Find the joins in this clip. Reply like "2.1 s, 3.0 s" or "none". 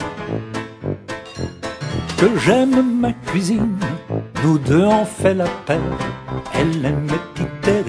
none